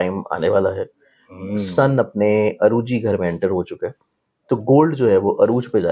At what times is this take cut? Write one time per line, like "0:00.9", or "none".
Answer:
none